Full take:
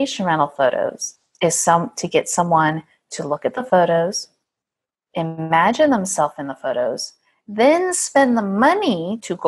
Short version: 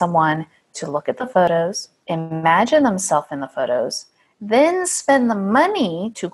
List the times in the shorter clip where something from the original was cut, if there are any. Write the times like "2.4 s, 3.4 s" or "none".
1.5 s